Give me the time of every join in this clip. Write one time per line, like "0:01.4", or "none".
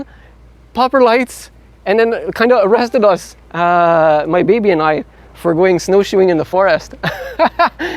none